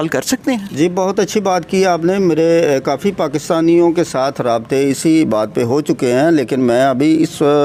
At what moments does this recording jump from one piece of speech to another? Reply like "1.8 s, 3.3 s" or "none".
none